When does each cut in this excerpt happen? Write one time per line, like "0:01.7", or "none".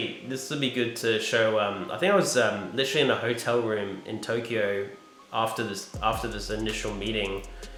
none